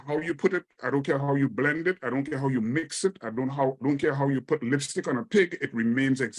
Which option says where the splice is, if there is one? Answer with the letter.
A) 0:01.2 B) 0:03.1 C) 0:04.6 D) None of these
D